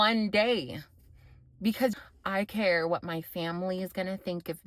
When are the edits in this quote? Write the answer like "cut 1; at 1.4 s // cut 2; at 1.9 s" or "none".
cut 1; at 1.9 s

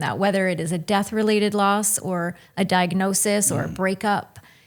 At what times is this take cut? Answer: none

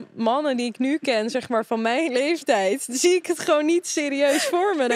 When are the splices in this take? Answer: none

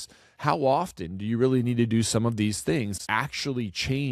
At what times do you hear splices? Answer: cut 1; at 3.0 s

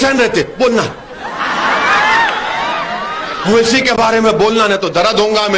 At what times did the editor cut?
none

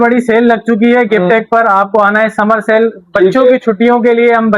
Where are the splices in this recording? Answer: none

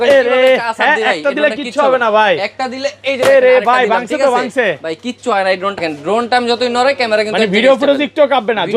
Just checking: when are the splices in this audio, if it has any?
cut 1; at 5.8 s

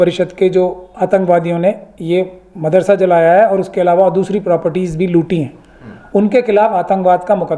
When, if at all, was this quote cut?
none

